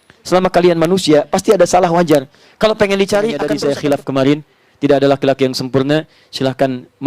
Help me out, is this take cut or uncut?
cut